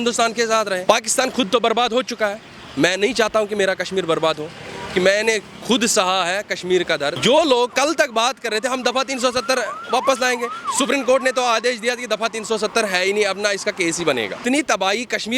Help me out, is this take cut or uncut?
cut